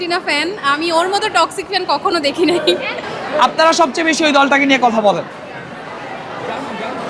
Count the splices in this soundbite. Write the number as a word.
one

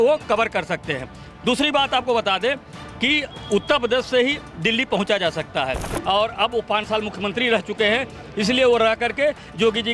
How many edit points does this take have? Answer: one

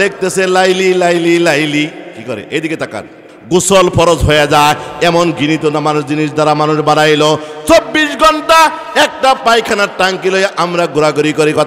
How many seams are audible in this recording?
one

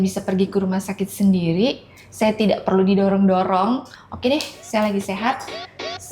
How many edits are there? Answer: one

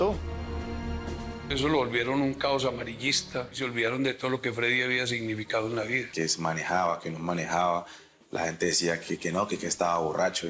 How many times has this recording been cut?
three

